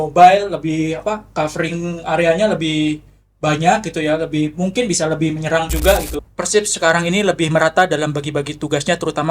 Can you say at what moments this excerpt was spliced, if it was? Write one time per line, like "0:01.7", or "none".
0:06.2